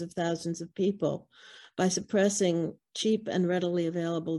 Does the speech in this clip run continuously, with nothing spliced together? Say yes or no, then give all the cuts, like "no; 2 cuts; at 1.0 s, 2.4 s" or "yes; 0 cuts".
yes; 0 cuts